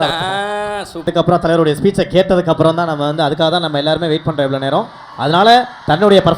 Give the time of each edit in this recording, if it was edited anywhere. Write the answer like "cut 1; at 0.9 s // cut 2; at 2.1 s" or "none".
cut 1; at 1.1 s